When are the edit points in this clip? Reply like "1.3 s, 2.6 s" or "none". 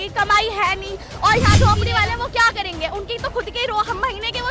1.6 s